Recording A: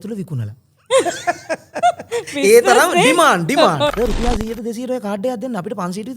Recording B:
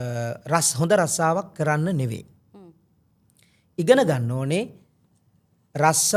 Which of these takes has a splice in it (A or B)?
A